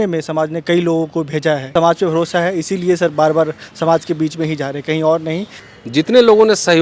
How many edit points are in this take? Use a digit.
2